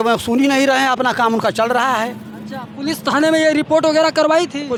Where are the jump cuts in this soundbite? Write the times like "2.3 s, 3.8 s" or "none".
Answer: none